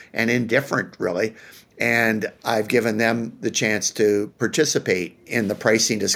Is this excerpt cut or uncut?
cut